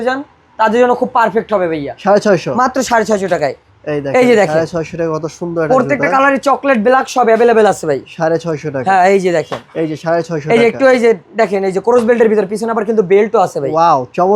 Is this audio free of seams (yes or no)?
yes